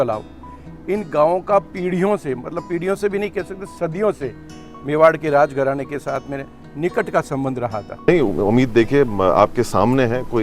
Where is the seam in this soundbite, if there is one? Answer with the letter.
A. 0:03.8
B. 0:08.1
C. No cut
B